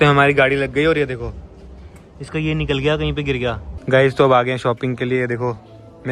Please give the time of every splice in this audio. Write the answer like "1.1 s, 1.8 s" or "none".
3.7 s